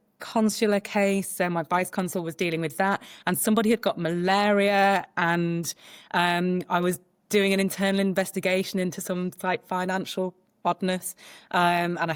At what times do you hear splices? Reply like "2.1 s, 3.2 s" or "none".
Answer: none